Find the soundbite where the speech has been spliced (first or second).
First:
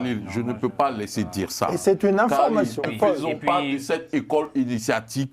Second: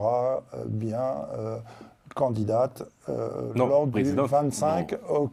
first